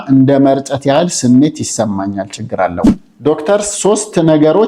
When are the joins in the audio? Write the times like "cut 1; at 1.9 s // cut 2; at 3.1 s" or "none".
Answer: cut 1; at 2.9 s